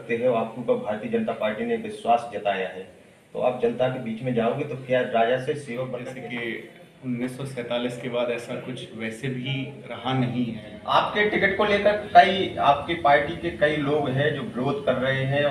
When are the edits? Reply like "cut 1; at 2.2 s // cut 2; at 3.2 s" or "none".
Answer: cut 1; at 6.1 s // cut 2; at 10.7 s